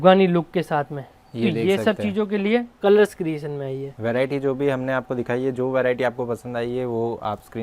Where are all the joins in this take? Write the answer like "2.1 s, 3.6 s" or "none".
none